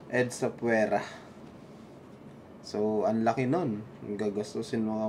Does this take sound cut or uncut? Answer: uncut